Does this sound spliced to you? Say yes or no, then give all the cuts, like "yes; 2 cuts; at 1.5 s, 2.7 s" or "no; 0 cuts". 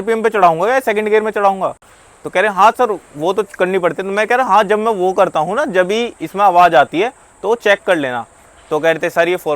no; 0 cuts